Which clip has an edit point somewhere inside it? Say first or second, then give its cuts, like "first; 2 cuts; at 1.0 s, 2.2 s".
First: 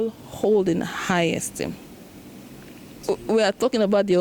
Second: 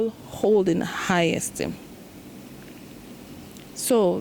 first; 1 cut; at 2.9 s